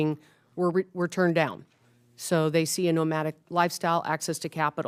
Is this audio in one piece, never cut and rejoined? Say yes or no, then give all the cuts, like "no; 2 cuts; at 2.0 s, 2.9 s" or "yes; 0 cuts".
yes; 0 cuts